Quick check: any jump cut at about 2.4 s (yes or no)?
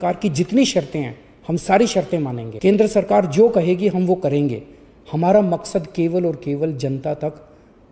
yes